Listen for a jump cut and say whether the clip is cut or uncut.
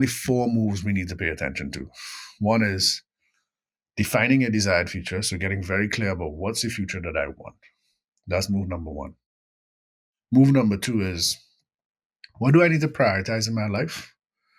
uncut